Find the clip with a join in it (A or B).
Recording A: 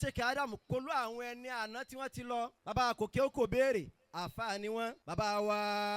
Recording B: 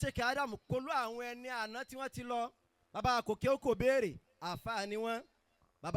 A